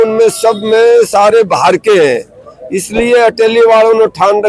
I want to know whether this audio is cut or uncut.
uncut